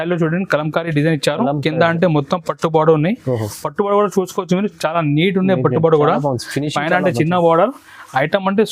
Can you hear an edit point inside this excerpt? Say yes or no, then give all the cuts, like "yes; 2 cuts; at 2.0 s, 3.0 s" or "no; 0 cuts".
no; 0 cuts